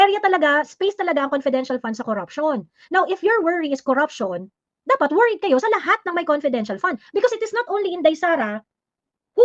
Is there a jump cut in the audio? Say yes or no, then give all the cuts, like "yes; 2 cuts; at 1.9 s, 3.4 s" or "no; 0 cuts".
no; 0 cuts